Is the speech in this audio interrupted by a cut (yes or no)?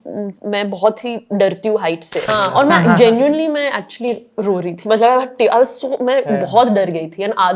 yes